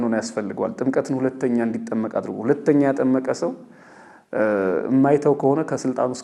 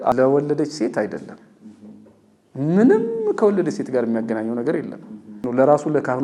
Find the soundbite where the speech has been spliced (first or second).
second